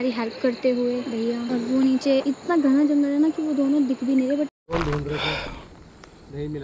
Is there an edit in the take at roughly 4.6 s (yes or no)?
yes